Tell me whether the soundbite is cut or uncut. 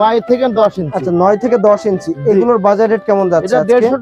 uncut